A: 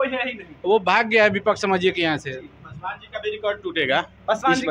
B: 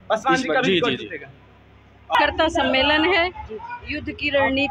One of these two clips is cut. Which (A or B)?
B